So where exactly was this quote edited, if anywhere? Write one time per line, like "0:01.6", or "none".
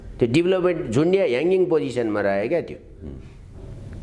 none